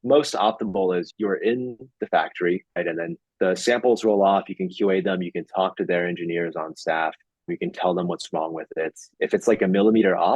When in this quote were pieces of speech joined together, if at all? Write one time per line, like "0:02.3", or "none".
0:01.1
0:02.7